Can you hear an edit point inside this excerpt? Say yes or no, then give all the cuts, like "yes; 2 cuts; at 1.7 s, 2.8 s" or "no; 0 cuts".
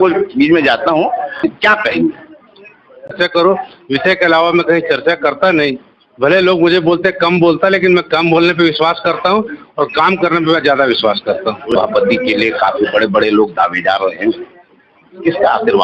yes; 3 cuts; at 1.4 s, 3.1 s, 11.7 s